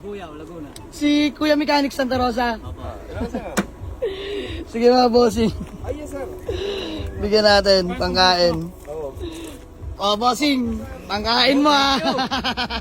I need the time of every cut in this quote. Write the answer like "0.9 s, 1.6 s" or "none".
none